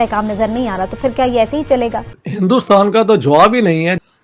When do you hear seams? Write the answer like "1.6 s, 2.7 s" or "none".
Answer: 2.1 s